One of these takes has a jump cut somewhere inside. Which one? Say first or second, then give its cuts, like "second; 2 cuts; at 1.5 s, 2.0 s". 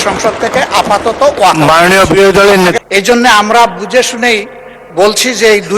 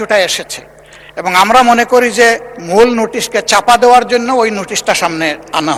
first; 1 cut; at 2.7 s